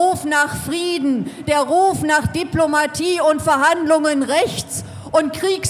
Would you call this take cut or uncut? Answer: uncut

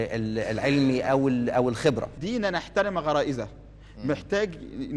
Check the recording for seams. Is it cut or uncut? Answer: cut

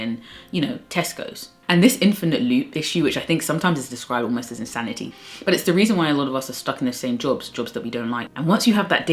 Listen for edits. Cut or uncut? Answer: cut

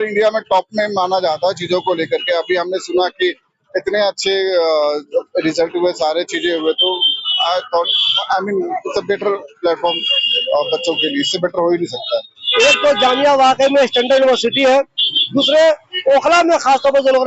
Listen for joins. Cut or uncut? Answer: cut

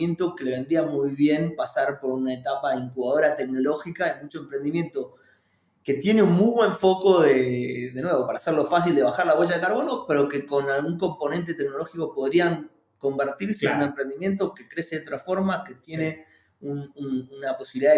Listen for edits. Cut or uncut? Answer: uncut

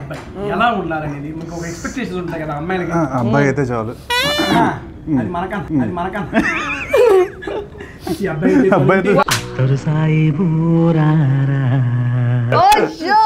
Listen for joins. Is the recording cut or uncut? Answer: uncut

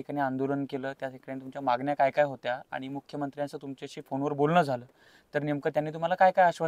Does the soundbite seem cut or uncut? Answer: uncut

